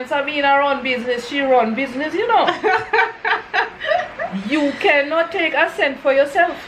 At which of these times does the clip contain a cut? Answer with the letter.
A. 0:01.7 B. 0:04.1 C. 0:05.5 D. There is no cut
D